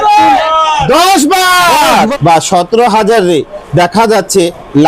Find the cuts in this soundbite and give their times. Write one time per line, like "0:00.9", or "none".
0:02.1